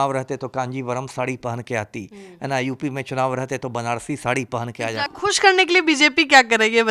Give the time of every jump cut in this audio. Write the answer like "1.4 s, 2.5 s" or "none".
5.1 s

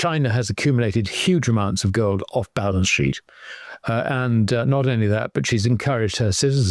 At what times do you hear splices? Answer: none

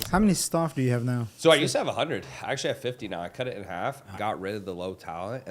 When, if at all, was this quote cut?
1.3 s, 4.1 s

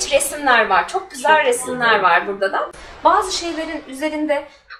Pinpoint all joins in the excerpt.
2.8 s

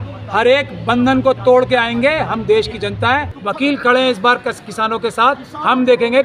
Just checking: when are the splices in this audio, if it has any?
3.4 s

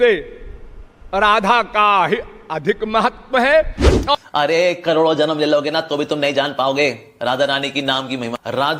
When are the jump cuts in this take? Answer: 4.2 s

